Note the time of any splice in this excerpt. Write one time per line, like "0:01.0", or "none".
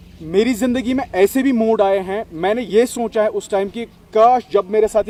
none